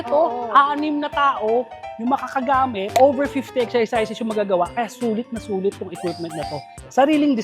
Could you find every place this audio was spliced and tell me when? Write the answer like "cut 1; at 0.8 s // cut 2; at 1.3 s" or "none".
none